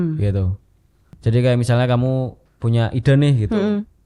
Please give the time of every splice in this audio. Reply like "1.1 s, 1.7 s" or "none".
1.2 s